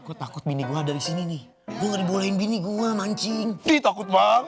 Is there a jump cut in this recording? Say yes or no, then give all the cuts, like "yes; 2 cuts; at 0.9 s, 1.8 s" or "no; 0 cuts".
no; 0 cuts